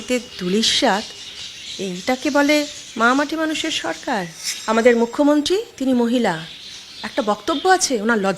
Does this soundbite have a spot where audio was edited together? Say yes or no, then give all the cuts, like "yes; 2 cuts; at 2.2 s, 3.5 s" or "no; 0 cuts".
no; 0 cuts